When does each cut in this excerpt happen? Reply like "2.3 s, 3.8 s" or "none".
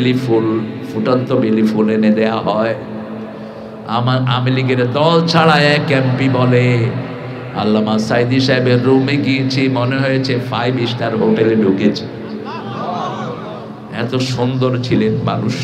none